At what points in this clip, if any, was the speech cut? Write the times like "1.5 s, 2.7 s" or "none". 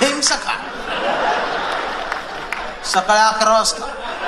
none